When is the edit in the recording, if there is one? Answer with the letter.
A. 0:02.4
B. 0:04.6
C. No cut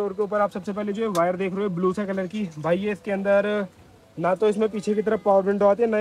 C